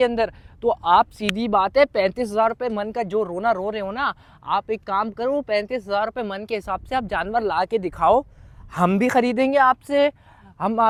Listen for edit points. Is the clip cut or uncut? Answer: uncut